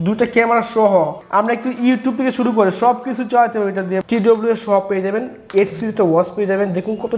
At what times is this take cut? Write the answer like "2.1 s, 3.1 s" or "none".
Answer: 1.2 s, 4.0 s